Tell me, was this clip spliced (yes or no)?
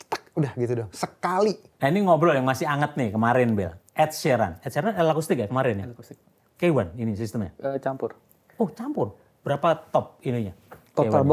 yes